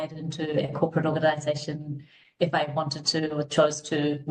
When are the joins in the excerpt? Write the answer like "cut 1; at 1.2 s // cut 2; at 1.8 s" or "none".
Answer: none